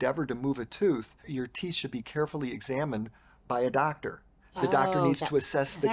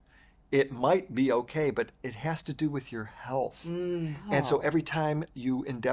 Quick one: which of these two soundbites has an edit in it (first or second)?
first